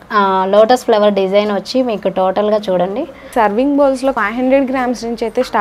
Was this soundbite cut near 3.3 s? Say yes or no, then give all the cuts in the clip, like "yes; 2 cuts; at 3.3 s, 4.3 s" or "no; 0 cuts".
yes; 2 cuts; at 3.3 s, 4.2 s